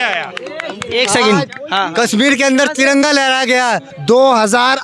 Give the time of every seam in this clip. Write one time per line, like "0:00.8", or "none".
0:03.9